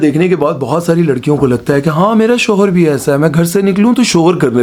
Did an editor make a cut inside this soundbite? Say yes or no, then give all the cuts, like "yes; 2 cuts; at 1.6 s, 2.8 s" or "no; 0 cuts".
no; 0 cuts